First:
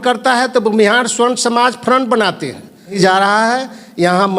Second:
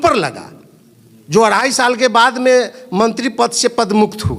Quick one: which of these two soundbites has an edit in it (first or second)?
first